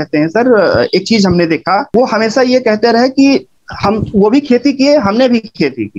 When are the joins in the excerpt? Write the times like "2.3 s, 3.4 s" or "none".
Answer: 1.9 s